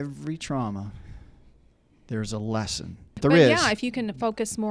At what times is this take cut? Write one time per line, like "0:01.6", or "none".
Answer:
0:03.2